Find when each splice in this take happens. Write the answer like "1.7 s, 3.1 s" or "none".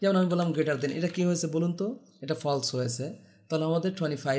none